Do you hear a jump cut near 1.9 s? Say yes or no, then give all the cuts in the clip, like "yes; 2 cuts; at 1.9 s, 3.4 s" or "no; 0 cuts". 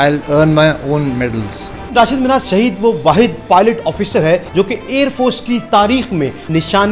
yes; 1 cut; at 1.9 s